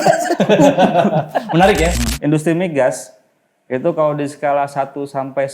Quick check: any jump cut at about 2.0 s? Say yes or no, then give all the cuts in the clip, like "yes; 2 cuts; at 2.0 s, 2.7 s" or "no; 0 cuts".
yes; 1 cut; at 2.0 s